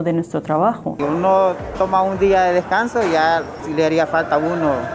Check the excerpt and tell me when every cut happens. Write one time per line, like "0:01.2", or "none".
0:01.0
0:03.6